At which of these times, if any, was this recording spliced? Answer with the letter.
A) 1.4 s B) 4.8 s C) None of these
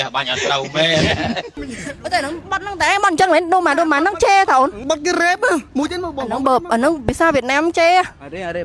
B